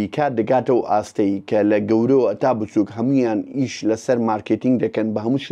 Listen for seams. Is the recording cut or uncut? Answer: uncut